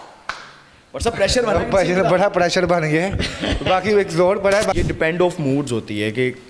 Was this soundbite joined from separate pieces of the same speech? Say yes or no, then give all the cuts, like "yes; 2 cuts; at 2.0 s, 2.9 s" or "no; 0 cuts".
yes; 1 cut; at 4.8 s